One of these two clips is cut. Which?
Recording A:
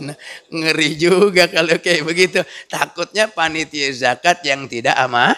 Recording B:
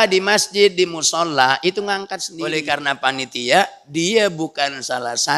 B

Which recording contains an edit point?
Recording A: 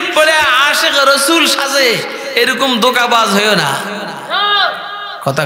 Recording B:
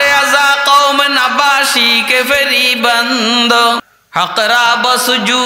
B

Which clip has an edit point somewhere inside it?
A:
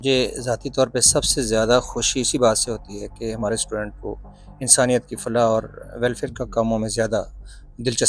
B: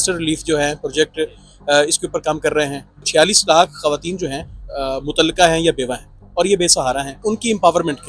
B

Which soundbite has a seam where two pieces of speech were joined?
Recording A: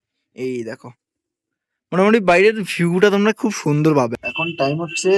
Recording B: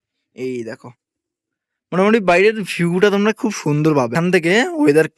A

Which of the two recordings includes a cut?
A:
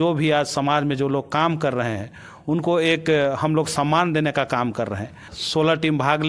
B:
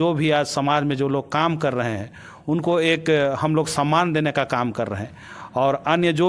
A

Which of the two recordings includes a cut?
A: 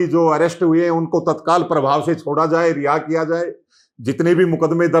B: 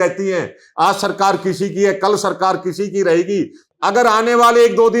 B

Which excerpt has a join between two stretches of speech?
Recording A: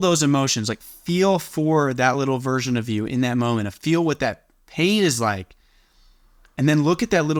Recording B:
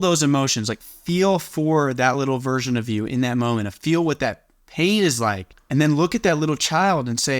B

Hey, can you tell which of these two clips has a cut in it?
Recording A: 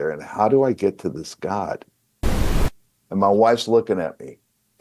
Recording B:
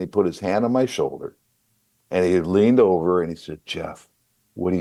A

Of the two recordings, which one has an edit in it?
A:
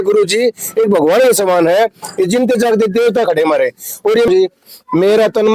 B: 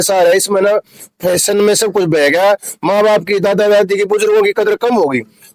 A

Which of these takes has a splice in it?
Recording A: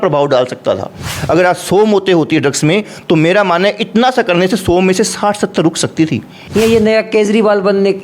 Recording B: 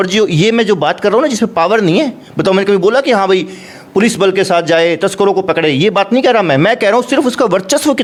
A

